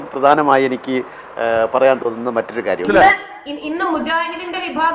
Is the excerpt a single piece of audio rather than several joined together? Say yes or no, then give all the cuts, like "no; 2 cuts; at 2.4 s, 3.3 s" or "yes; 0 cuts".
no; 1 cut; at 2.8 s